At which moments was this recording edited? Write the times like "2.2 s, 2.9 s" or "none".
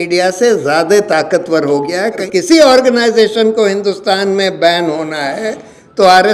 2.2 s